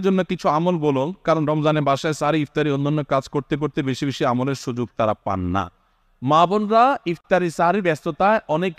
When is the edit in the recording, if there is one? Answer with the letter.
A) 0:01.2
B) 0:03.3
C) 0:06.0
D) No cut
D